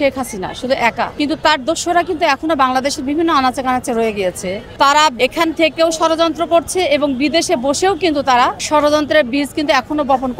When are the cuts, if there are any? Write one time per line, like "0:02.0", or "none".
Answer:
0:01.1
0:04.6
0:05.2
0:08.6